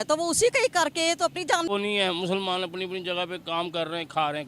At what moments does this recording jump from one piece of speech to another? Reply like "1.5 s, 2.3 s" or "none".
1.7 s